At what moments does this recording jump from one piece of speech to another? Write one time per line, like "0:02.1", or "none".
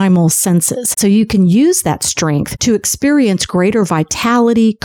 0:00.9